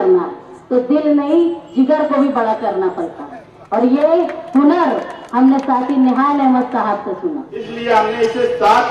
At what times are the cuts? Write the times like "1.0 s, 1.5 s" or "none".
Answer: 7.6 s

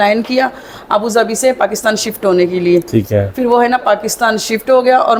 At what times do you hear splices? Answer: none

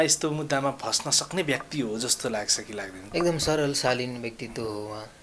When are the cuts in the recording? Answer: 3.1 s

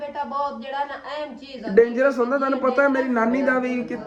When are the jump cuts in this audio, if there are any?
none

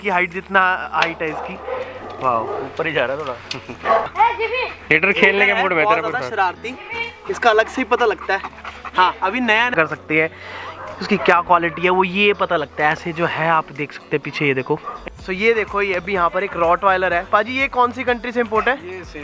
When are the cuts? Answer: 4.1 s, 9.7 s, 15.0 s

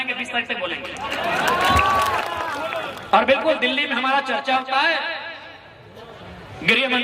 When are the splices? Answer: 2.2 s

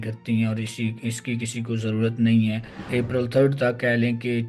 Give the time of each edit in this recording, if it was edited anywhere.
2.8 s

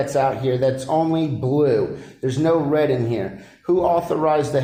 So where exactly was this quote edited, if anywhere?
none

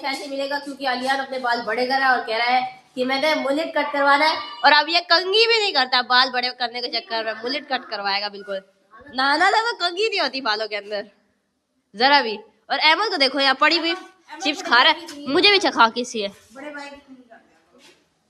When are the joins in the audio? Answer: none

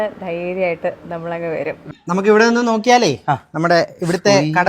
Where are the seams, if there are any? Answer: 2.0 s

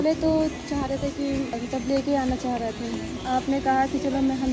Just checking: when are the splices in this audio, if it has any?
1.6 s, 3.1 s

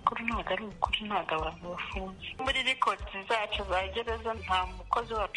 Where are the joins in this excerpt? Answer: 2.4 s, 4.4 s

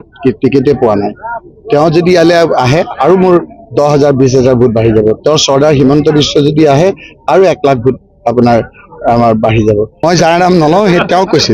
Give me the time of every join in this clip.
10.0 s

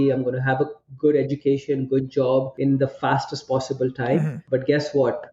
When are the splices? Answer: 2.5 s, 4.4 s

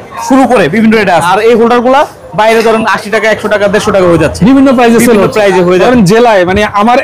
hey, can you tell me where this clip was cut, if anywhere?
1.3 s, 5.8 s

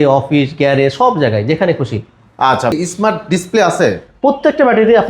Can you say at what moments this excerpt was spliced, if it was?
2.7 s

